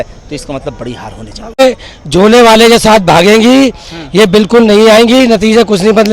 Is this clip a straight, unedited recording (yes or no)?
no